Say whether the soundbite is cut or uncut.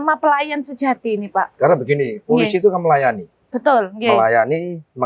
uncut